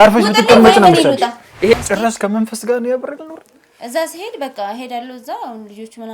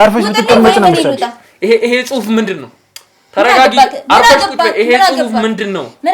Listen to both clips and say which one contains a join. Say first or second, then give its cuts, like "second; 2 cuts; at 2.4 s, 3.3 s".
first; 1 cut; at 1.7 s